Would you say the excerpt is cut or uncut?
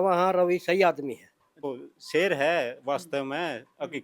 cut